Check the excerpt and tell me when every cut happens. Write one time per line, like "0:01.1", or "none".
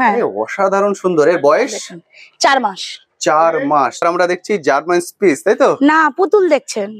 0:04.0